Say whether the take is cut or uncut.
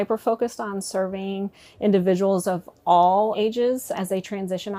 uncut